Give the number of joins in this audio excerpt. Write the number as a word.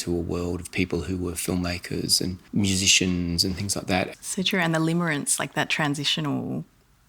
two